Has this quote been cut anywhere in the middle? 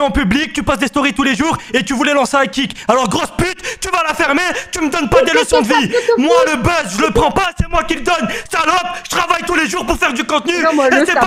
no; 0 cuts

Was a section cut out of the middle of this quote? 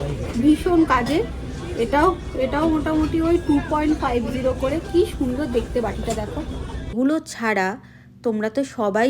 yes; 1 cut; at 6.9 s

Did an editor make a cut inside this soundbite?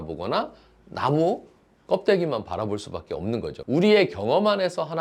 yes; 1 cut; at 3.6 s

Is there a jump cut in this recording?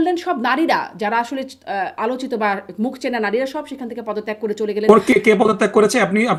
no; 0 cuts

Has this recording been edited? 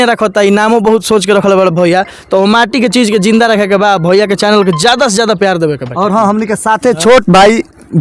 no; 0 cuts

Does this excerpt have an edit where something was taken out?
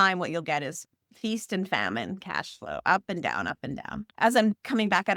yes; 1 cut; at 4.1 s

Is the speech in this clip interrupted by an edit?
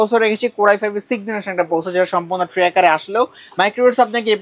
no; 0 cuts

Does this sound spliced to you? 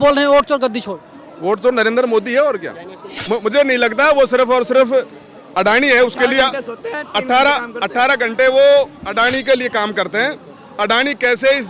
yes; 1 cut; at 3.1 s

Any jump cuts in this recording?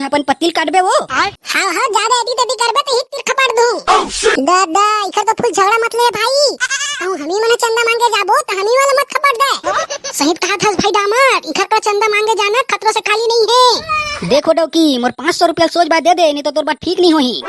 no; 0 cuts

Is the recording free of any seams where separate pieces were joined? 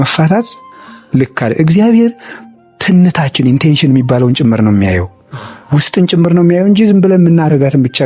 yes; 0 cuts

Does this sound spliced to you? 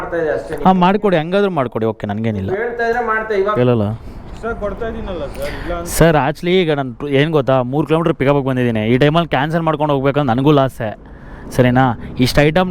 yes; 1 cut; at 3.5 s

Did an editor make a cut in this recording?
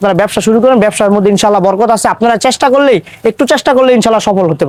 no; 0 cuts

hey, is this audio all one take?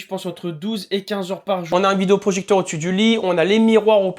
no; 1 cut; at 1.7 s

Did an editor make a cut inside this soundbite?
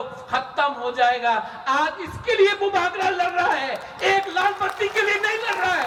no; 0 cuts

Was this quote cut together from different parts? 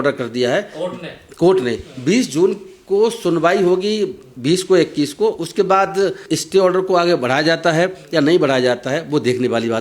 no; 0 cuts

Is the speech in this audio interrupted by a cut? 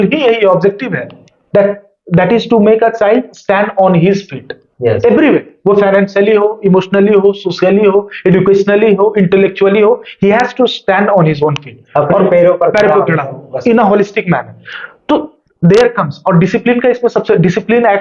no; 0 cuts

